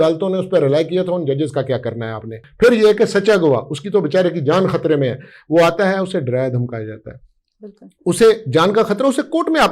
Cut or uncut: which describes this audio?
cut